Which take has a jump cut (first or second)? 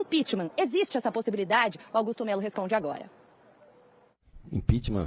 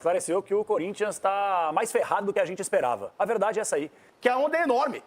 second